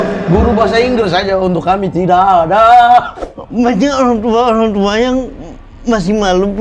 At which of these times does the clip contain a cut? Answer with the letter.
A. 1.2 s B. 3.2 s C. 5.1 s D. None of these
B